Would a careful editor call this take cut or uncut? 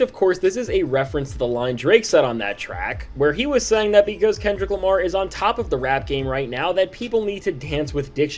uncut